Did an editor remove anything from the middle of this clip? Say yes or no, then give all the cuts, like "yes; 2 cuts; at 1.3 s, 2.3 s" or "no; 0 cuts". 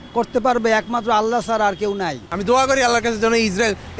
yes; 1 cut; at 2.3 s